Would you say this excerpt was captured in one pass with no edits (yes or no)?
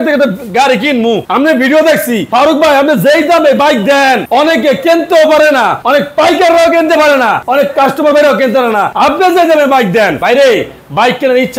no